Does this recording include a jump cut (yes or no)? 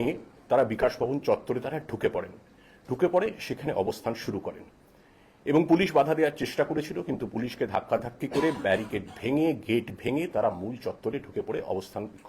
no